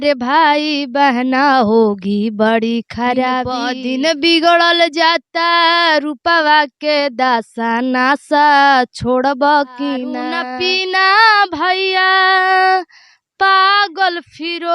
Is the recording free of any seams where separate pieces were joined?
no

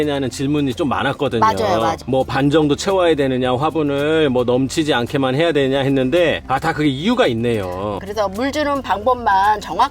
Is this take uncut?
no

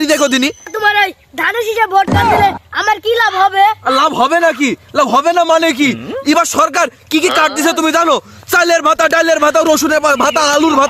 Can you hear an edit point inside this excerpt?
no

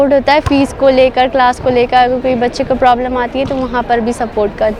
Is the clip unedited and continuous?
yes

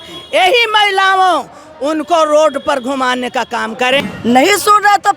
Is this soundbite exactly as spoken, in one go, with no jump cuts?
no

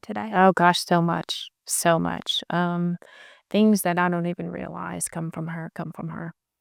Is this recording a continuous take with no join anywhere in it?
yes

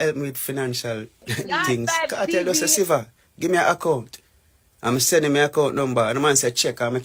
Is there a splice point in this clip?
no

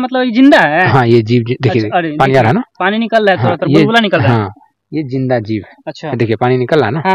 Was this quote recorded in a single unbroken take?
yes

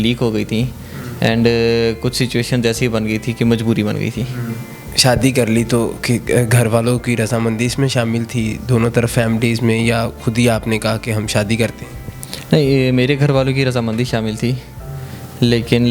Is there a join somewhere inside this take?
no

